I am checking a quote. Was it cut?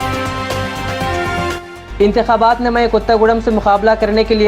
yes; 1 cut; at 1.7 s

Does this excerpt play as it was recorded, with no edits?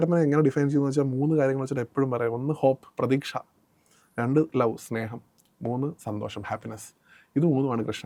yes; 0 cuts

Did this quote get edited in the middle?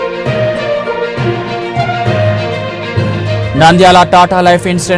yes; 1 cut; at 3.4 s

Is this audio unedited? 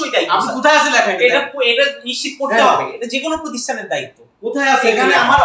yes; 0 cuts

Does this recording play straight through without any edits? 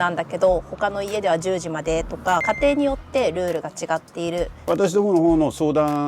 no; 2 cuts; at 2.4 s, 4.6 s

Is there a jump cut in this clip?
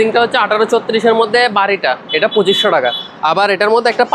no; 0 cuts

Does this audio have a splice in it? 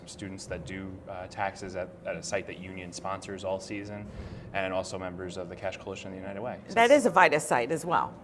yes; 1 cut; at 6.4 s

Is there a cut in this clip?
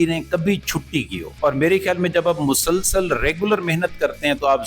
yes; 1 cut; at 1.3 s

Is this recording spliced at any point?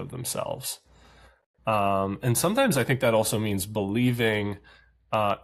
no; 0 cuts

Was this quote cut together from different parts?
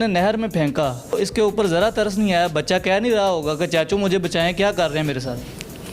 yes; 1 cut; at 1.1 s

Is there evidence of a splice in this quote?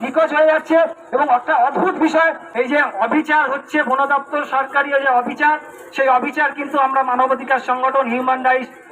yes; 1 cut; at 2.4 s

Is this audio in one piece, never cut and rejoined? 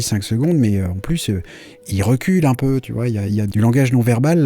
no; 2 cuts; at 1.9 s, 3.4 s

